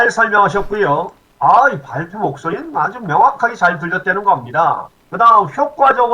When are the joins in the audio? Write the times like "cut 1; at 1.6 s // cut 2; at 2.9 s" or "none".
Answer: cut 1; at 1.2 s

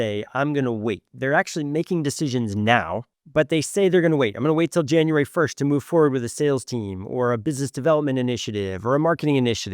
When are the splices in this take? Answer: cut 1; at 3.2 s

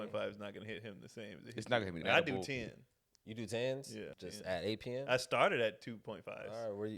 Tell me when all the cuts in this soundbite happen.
cut 1; at 2.0 s // cut 2; at 4.1 s

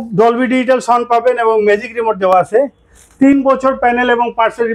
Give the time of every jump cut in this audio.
none

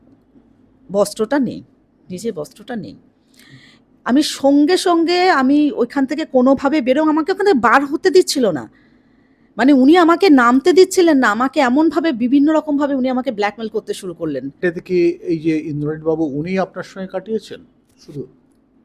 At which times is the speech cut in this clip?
cut 1; at 14.6 s

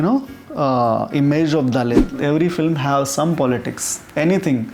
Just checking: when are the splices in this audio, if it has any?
cut 1; at 2.1 s

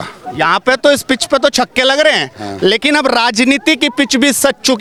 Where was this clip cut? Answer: none

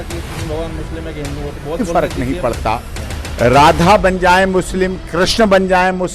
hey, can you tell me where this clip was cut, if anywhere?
cut 1; at 1.8 s

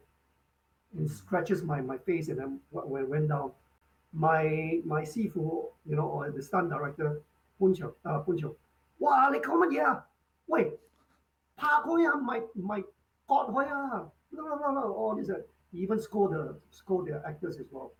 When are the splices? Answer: none

